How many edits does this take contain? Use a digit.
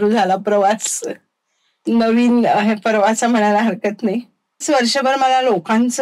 1